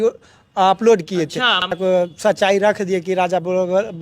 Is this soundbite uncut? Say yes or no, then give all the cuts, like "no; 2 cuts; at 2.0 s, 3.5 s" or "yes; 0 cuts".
no; 1 cut; at 1.7 s